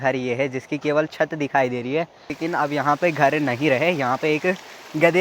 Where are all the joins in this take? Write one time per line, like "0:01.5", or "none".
0:02.4